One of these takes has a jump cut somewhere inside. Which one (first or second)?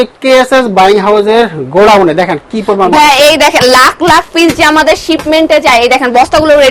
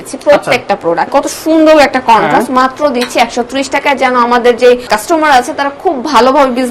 second